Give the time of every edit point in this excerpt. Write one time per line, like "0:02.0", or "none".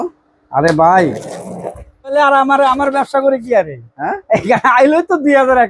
0:02.1